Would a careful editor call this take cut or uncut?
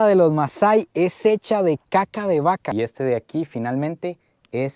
cut